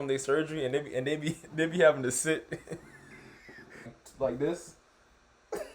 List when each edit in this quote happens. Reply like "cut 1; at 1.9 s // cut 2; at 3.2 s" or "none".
cut 1; at 4.0 s